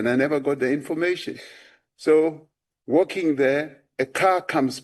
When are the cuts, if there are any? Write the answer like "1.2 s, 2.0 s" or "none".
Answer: none